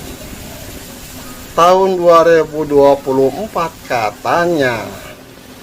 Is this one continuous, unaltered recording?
yes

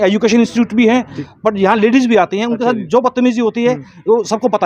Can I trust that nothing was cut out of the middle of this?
no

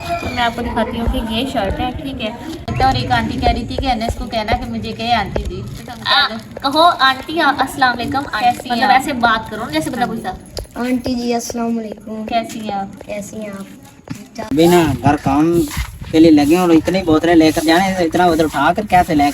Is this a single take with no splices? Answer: no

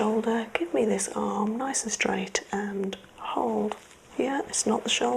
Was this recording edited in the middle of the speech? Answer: no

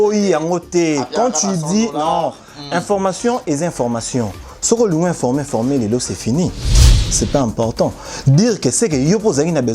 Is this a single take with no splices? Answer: no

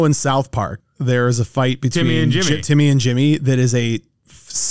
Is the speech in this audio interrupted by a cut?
no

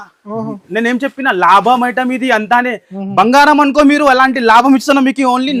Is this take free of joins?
yes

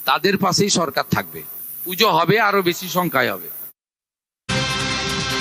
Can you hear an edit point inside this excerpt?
yes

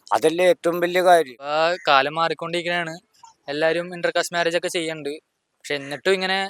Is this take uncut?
no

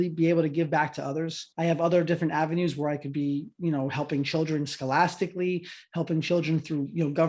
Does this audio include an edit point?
yes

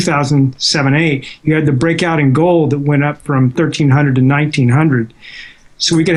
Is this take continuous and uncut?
yes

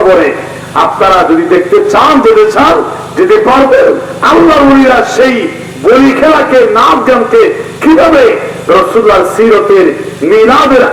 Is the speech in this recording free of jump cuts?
yes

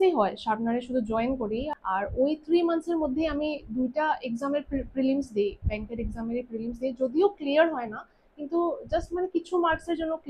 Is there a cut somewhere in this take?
yes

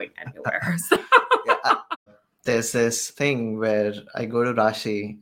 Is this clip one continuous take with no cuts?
no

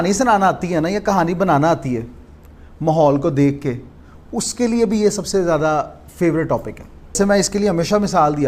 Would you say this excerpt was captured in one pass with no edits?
no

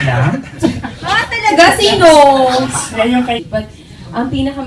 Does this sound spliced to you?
no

